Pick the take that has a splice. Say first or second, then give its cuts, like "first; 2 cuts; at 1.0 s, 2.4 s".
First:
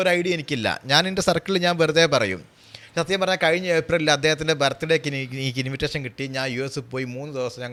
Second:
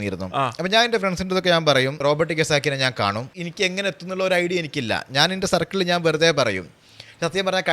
second; 2 cuts; at 2.0 s, 3.3 s